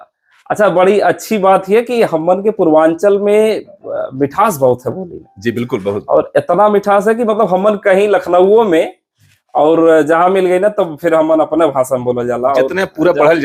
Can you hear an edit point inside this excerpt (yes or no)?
no